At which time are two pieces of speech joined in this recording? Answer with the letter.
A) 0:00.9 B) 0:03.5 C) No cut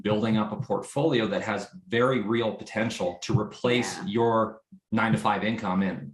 C